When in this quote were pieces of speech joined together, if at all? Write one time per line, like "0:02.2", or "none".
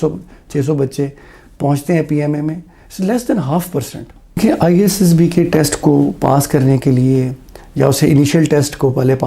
0:04.4